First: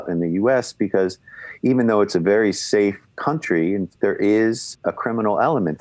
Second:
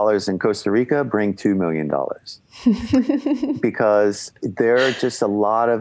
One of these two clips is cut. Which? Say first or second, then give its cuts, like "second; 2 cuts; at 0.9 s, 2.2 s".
first; 2 cuts; at 3.9 s, 4.7 s